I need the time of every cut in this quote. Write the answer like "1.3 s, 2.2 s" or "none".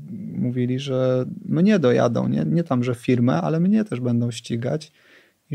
none

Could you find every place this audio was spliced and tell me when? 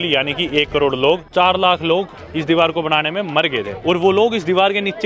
1.3 s, 3.7 s

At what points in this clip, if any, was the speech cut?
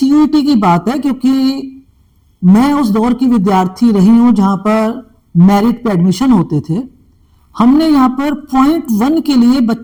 none

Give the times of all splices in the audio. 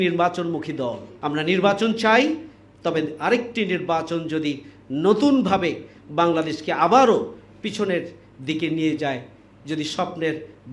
1.1 s

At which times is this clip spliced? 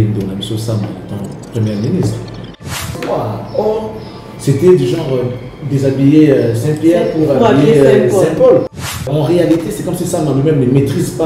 2.9 s, 9.1 s

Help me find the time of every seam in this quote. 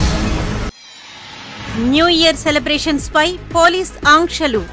1.5 s

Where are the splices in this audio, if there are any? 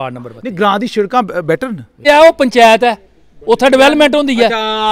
2.0 s

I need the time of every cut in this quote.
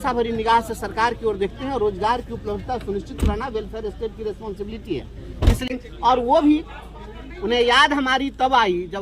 5.7 s

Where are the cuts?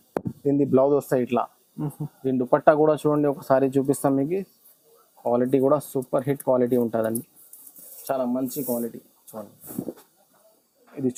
none

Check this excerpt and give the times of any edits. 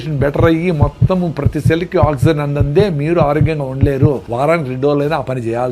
4.3 s

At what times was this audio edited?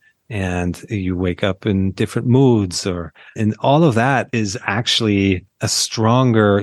4.3 s, 5.5 s

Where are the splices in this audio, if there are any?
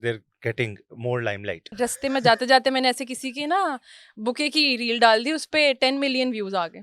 1.7 s

